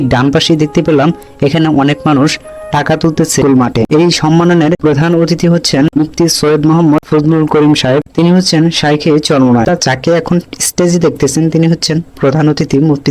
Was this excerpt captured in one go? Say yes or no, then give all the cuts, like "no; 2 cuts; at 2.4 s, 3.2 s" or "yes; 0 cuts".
no; 2 cuts; at 3.4 s, 9.7 s